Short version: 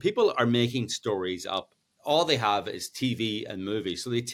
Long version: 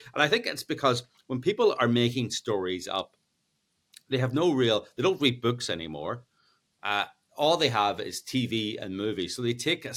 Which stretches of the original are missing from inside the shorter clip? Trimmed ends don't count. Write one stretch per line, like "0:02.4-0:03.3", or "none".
0:03.3-0:07.2